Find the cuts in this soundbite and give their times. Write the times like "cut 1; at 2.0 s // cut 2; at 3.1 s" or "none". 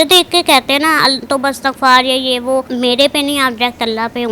cut 1; at 2.7 s